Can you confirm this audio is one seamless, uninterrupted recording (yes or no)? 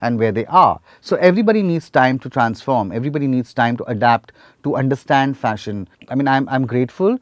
yes